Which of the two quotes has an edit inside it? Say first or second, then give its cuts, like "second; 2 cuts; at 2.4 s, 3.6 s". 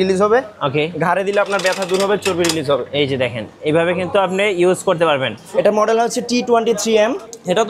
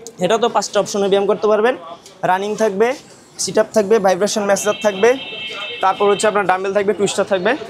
first; 1 cut; at 5.4 s